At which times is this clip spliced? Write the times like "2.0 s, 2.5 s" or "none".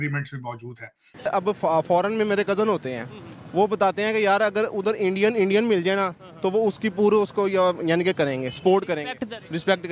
1.3 s